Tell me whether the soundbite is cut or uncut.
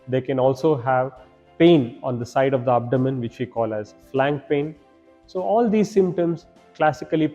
uncut